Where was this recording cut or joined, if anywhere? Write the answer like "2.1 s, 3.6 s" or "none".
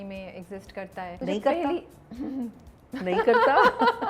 1.2 s, 2.4 s